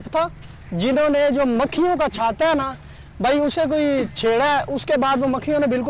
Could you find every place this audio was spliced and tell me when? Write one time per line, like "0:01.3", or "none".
none

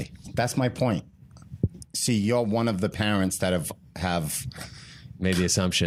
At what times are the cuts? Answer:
none

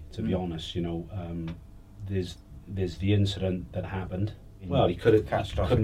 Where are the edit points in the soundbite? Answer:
0:04.6

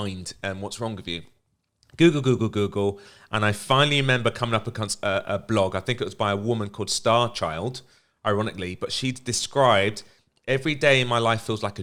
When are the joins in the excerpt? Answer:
none

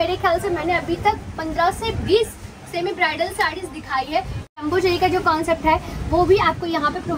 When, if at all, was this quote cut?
0:04.5

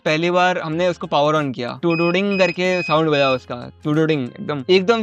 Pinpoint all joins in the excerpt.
none

